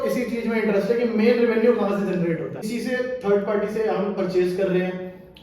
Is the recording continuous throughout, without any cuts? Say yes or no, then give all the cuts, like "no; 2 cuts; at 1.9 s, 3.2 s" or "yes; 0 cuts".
no; 1 cut; at 2.6 s